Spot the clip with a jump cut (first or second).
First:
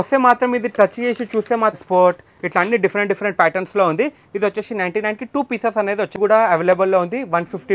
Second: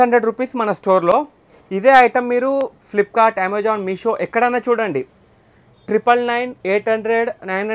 first